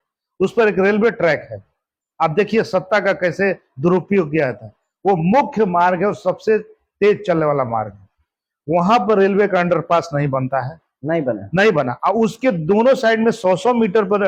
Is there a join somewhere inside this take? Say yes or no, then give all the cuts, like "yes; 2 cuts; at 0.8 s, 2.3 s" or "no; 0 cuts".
no; 0 cuts